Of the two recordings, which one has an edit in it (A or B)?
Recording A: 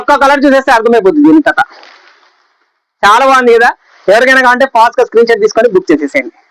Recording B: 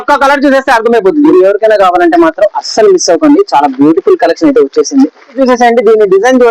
B